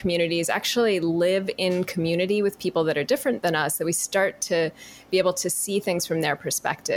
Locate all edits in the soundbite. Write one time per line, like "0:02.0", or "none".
0:01.1